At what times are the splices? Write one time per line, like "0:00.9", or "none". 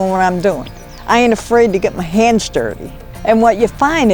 none